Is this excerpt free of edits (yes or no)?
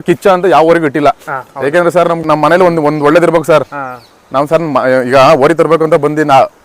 no